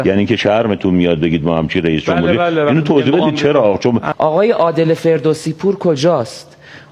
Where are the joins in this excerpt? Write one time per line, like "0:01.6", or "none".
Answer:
0:04.1